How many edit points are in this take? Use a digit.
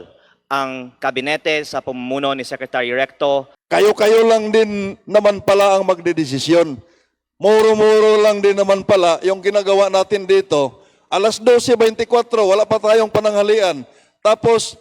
1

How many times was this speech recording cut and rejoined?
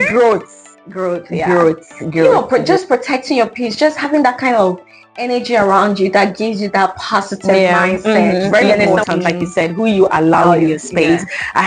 2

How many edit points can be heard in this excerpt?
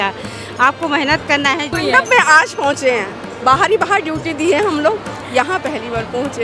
1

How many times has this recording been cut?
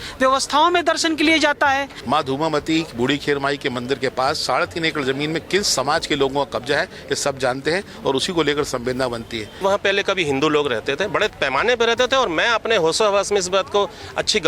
2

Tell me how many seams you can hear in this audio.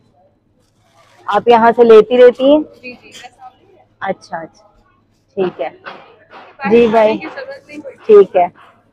0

